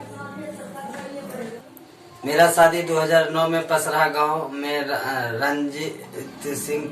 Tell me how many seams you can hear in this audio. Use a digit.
1